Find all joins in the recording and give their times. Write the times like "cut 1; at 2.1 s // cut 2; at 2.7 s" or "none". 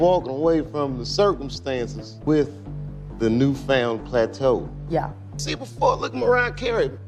cut 1; at 5.5 s

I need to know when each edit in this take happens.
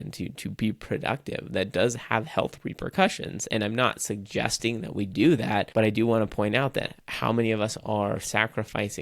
cut 1; at 5.7 s

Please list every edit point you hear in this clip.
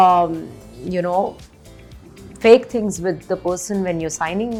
none

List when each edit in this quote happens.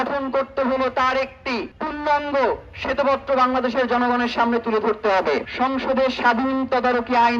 cut 1; at 1.7 s // cut 2; at 5.5 s

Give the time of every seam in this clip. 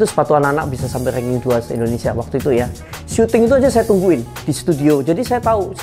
cut 1; at 2.8 s

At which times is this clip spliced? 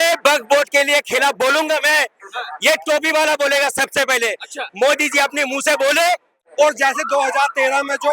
cut 1; at 6.4 s

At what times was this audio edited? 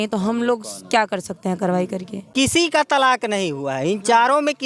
cut 1; at 2.3 s

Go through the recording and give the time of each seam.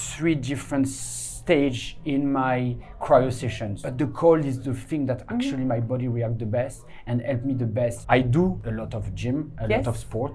cut 1; at 8.0 s // cut 2; at 8.6 s

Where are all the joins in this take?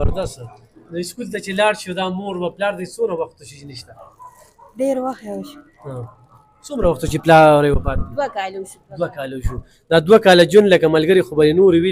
none

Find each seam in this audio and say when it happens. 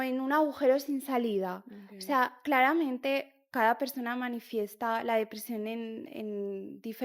none

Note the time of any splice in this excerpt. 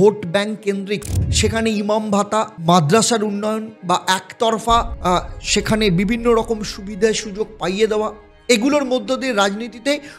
cut 1; at 3.7 s // cut 2; at 4.9 s

